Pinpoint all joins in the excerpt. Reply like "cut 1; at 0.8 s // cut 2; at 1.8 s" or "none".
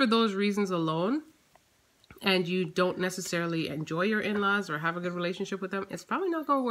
none